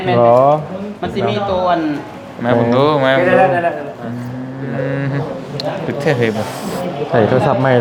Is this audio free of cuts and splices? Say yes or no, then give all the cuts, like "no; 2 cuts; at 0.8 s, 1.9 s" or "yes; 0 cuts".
yes; 0 cuts